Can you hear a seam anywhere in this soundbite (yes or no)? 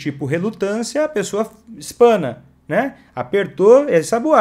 no